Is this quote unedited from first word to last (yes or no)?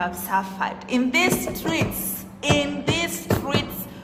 yes